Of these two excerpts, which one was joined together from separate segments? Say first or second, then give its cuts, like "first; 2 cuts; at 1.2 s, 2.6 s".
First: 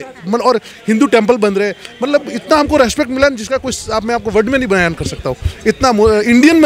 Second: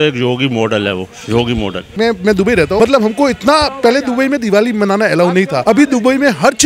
second; 3 cuts; at 1.8 s, 2.8 s, 5.6 s